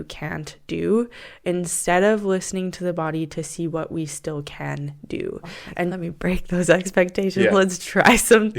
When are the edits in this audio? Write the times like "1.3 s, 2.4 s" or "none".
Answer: 6.0 s